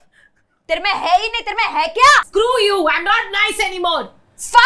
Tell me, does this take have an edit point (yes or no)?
yes